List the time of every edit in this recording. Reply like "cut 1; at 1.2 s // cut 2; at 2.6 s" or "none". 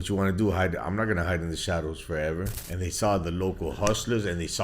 cut 1; at 2.6 s